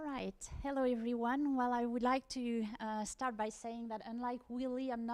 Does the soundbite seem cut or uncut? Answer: uncut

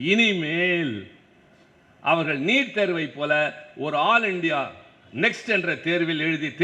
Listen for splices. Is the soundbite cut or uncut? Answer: uncut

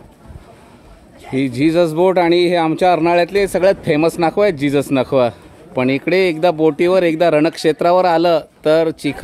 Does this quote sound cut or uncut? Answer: uncut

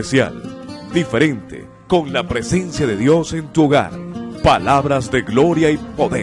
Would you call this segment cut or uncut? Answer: uncut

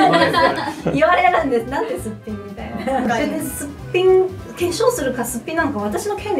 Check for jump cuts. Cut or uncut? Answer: cut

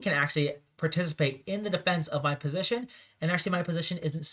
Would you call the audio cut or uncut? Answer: uncut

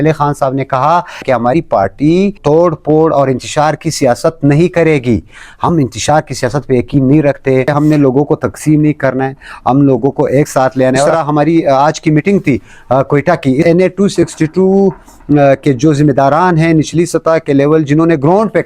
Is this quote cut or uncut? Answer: cut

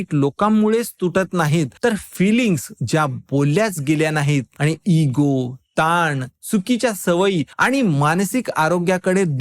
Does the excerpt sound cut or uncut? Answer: cut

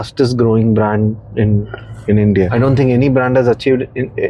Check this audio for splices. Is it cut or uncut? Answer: cut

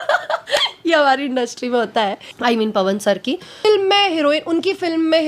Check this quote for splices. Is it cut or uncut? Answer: cut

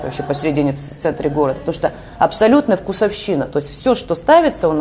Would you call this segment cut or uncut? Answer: uncut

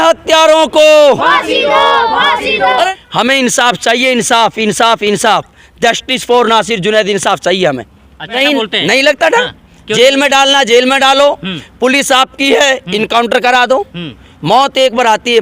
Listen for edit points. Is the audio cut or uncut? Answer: cut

